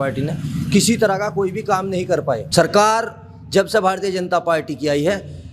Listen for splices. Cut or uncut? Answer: cut